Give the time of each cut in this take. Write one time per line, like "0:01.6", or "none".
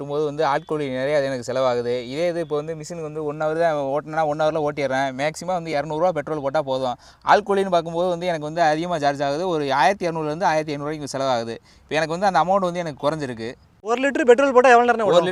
none